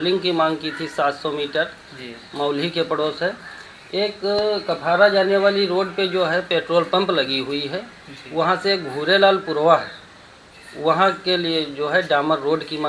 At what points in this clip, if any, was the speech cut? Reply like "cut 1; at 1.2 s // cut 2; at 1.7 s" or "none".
none